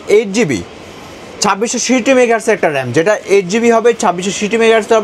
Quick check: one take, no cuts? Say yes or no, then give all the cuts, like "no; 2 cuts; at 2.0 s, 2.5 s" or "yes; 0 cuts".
yes; 0 cuts